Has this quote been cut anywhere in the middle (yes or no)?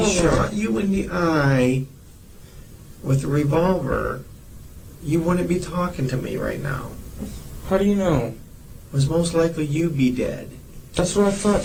no